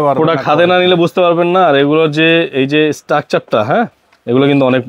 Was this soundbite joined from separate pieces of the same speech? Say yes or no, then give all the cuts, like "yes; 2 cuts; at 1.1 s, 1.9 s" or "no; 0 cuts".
no; 0 cuts